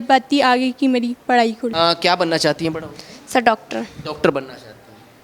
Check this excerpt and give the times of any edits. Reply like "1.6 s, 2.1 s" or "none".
1.7 s